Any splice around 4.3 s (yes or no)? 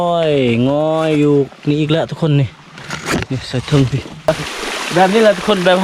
yes